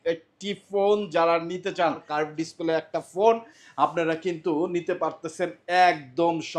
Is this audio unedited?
no; 1 cut; at 2.1 s

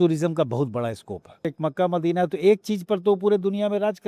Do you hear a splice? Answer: yes; 1 cut; at 1.5 s

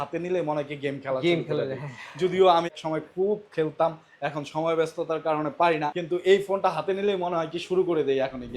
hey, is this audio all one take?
no; 2 cuts; at 2.7 s, 6.0 s

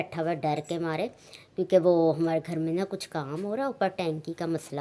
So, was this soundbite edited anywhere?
no; 0 cuts

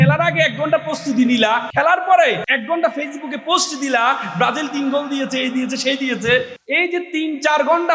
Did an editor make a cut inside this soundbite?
yes; 3 cuts; at 1.7 s, 2.5 s, 6.6 s

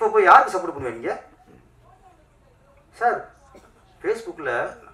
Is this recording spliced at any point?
no; 0 cuts

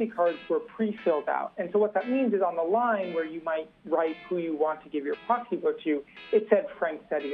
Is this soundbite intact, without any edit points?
yes; 0 cuts

